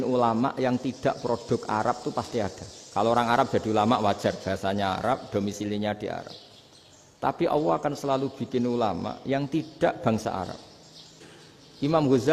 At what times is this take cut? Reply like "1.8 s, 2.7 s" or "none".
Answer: none